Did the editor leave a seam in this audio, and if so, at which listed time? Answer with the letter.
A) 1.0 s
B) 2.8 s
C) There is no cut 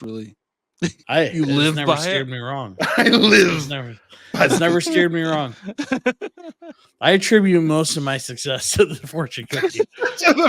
A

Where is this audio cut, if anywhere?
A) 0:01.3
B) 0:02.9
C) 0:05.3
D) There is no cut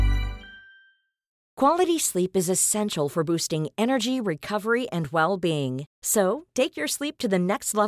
A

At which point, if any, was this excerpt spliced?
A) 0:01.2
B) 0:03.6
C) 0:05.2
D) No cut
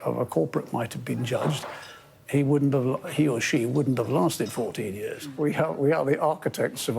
C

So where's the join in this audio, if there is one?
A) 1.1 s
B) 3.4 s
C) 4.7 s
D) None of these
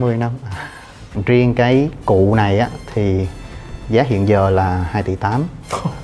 A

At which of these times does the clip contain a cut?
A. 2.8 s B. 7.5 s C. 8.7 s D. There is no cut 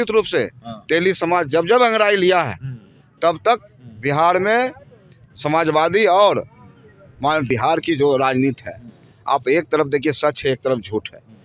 B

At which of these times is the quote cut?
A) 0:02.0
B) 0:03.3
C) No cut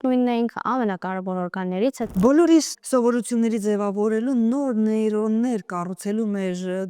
A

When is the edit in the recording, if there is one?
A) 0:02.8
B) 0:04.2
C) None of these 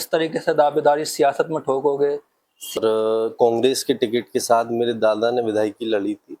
A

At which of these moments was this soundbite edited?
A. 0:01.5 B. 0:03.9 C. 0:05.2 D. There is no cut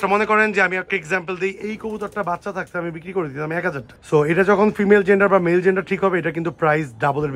B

